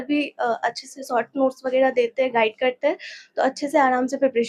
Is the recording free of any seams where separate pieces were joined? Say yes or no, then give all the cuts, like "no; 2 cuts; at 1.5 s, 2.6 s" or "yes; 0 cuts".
yes; 0 cuts